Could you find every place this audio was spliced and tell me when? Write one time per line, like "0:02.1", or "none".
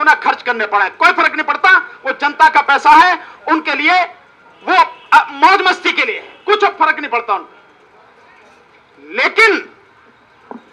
none